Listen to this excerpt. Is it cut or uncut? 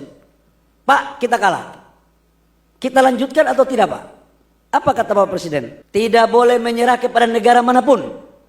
cut